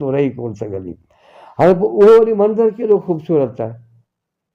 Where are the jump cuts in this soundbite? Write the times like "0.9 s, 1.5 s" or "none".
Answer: none

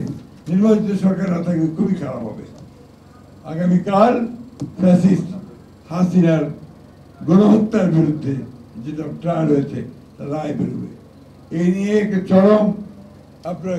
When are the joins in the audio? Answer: none

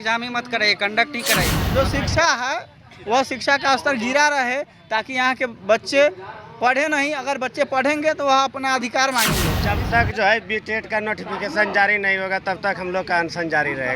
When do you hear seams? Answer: 1.6 s, 9.5 s

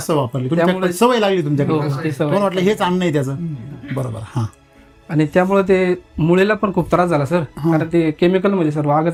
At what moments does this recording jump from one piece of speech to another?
none

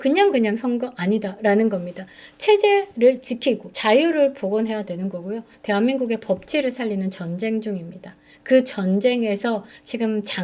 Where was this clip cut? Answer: 3.7 s

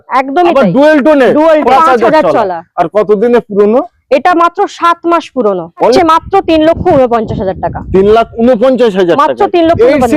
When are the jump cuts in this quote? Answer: 1.7 s, 6.0 s

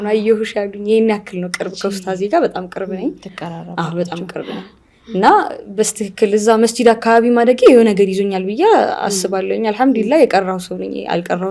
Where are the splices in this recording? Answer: none

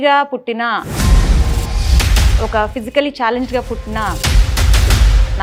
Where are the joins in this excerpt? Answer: none

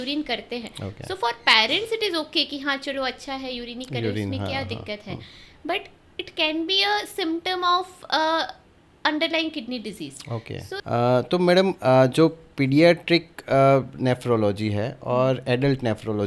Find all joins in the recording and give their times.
10.8 s

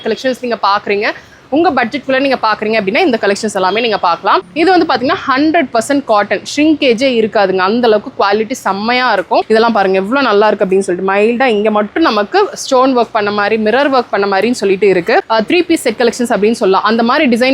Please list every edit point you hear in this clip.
4.5 s, 9.5 s, 15.3 s

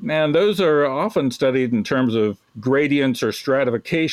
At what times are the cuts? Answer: 2.5 s

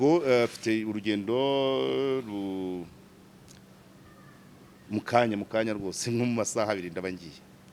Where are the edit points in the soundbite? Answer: none

